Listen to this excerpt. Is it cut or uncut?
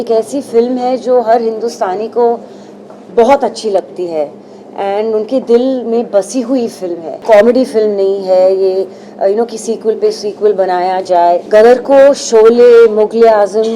cut